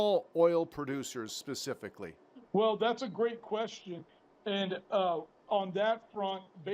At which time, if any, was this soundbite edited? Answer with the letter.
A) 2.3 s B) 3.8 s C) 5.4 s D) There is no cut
A